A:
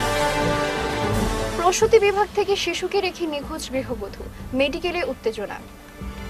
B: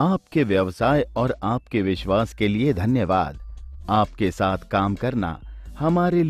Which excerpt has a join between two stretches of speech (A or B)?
A